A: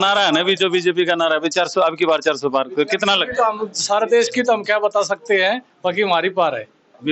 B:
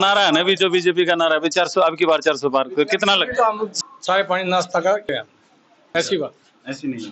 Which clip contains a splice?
B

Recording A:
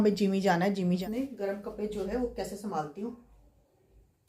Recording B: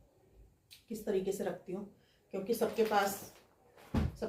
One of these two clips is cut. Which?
A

